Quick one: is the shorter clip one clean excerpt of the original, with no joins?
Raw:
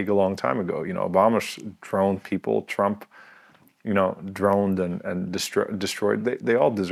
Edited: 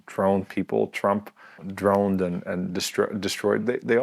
no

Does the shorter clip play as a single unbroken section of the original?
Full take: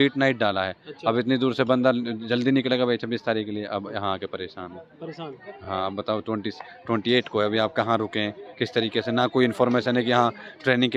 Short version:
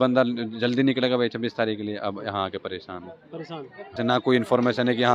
no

